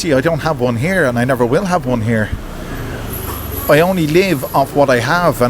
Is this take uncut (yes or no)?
yes